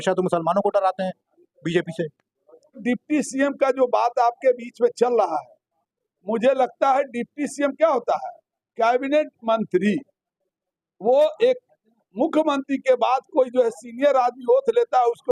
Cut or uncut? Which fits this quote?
cut